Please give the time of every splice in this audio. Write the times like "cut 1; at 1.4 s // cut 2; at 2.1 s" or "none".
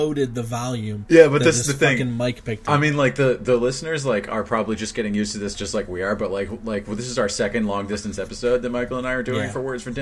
cut 1; at 0.9 s

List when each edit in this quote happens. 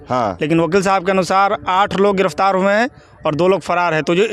none

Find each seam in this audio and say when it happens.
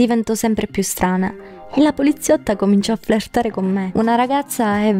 cut 1; at 3.9 s

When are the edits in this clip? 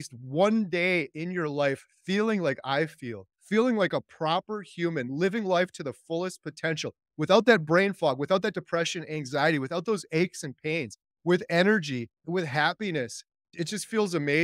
cut 1; at 12.2 s // cut 2; at 13.5 s

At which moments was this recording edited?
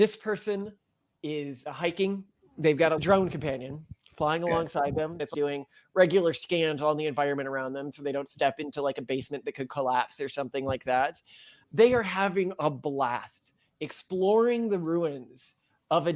cut 1; at 3.0 s // cut 2; at 5.3 s

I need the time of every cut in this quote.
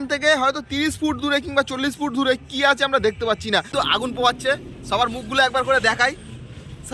cut 1; at 3.7 s

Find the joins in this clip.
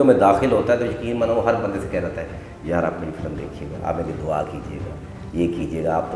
none

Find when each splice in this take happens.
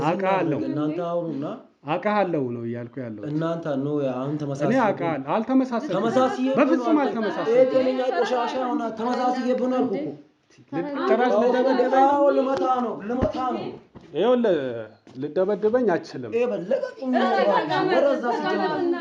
none

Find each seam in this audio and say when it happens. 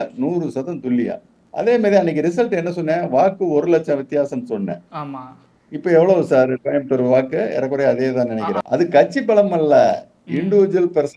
cut 1; at 8.6 s

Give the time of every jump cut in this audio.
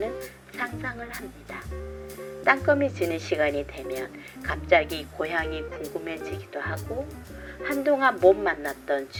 none

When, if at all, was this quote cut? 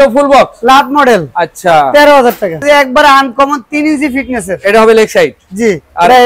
cut 1; at 2.6 s

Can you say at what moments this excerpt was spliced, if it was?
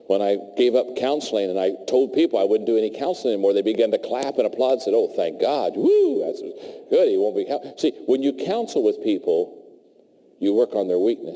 cut 1; at 5.8 s

